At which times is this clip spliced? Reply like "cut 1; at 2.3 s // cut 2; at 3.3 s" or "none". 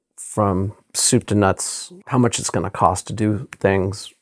cut 1; at 1.9 s